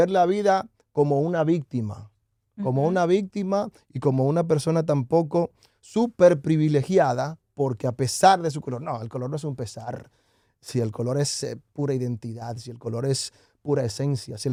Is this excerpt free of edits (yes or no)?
yes